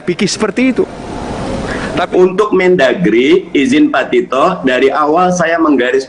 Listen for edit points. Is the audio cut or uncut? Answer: cut